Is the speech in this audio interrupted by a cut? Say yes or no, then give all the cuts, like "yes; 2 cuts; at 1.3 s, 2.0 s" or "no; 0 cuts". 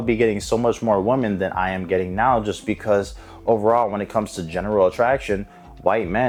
no; 0 cuts